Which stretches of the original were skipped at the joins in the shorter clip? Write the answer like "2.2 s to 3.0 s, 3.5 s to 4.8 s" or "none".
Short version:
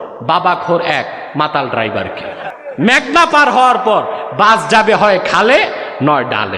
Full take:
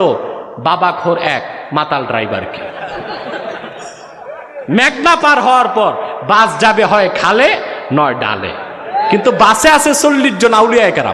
2.9 s to 4.4 s